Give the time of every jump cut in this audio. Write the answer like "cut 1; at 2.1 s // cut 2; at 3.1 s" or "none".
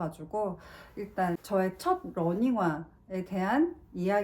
cut 1; at 1.4 s